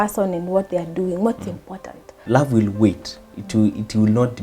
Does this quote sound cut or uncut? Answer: cut